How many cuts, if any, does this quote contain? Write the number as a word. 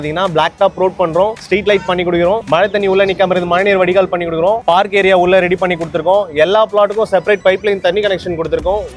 zero